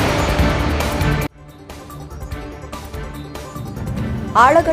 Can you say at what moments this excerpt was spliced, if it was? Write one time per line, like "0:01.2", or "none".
none